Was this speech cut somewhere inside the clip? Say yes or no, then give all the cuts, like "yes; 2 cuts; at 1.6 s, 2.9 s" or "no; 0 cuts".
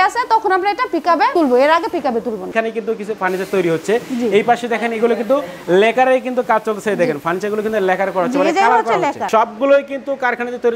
yes; 2 cuts; at 2.5 s, 9.2 s